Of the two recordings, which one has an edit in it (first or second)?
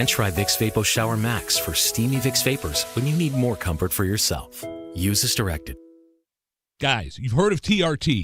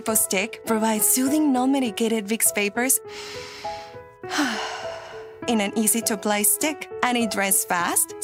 first